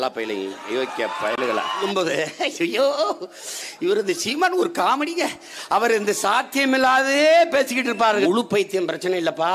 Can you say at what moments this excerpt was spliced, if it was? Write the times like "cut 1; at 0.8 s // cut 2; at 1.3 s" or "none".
cut 1; at 1.8 s // cut 2; at 8.2 s